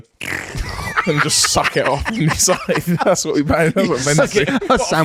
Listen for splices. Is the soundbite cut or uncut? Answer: uncut